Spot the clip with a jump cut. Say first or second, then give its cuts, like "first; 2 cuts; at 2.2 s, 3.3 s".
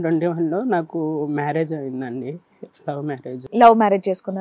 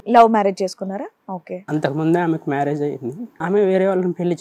second; 1 cut; at 3.3 s